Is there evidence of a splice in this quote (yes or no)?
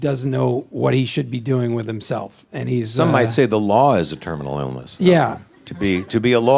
no